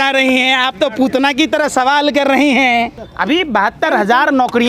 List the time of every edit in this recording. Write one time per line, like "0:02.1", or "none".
none